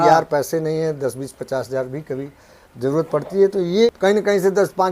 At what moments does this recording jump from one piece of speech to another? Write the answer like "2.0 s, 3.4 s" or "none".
3.9 s